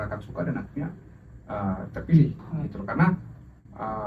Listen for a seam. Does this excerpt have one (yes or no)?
no